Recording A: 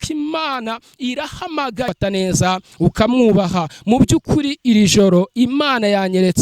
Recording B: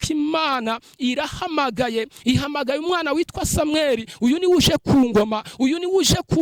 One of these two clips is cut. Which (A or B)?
A